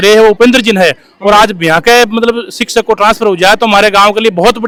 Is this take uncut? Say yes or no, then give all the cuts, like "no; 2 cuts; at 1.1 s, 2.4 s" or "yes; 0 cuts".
yes; 0 cuts